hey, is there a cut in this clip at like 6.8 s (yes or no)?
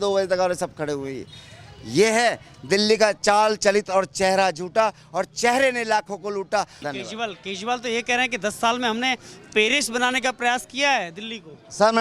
yes